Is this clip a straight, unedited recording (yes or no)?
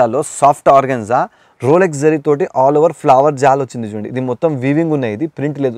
yes